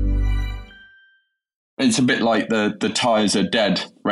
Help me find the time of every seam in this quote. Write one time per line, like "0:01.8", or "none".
0:01.8